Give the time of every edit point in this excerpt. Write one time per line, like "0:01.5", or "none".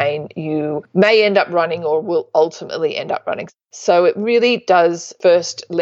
0:03.4